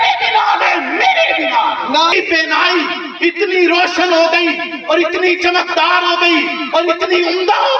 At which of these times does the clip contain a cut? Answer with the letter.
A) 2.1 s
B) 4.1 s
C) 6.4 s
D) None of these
A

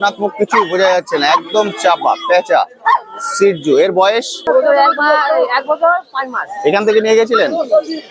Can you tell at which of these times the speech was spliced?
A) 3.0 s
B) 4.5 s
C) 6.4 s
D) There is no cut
B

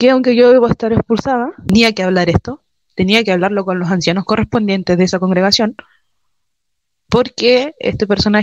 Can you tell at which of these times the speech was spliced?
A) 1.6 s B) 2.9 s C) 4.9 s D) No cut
A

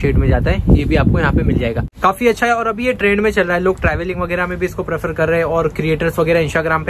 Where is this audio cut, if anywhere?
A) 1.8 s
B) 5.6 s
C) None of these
A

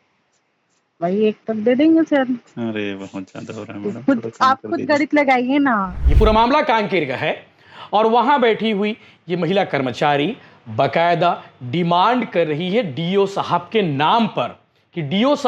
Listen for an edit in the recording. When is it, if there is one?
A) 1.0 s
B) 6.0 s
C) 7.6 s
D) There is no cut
B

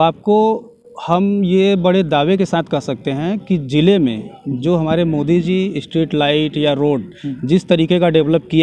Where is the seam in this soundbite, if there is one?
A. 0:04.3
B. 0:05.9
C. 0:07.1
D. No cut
D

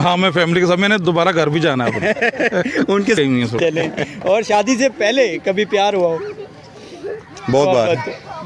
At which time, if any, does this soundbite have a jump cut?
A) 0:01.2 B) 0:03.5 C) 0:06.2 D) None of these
B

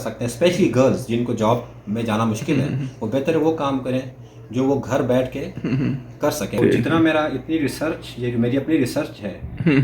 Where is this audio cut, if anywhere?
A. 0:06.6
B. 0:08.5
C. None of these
A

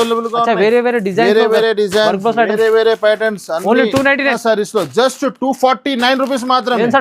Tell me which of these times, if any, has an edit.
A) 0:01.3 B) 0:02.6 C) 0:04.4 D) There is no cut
C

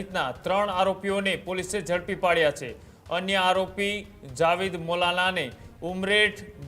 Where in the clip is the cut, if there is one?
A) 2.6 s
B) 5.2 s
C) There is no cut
C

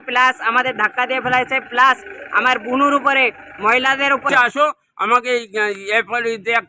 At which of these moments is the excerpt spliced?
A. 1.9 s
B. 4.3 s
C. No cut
B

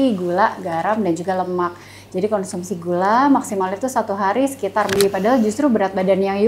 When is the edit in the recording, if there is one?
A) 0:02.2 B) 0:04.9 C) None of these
B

